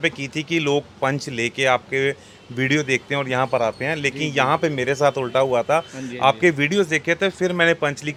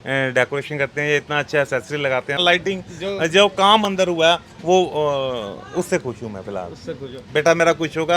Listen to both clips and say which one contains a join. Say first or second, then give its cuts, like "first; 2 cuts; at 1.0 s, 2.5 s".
second; 1 cut; at 2.4 s